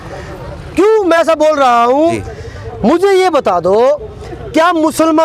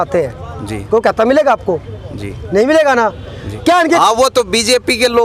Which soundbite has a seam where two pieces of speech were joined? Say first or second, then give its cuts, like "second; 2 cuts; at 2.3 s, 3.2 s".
first; 1 cut; at 2.3 s